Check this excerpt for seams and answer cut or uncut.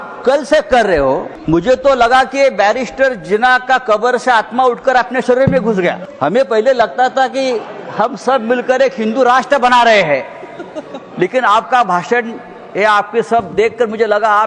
cut